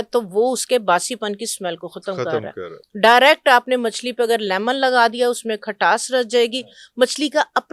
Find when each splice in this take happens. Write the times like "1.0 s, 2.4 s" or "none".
none